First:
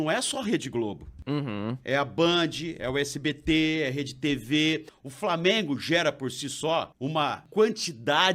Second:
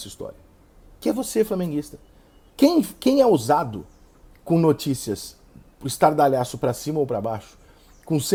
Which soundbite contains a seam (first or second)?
first